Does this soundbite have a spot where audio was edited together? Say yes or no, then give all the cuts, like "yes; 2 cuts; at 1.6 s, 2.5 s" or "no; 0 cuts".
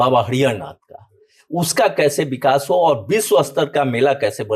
no; 0 cuts